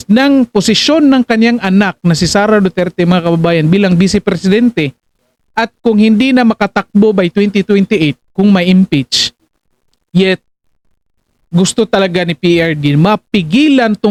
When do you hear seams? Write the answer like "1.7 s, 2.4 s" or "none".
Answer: none